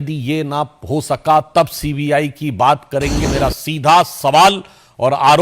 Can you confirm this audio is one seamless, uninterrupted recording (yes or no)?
no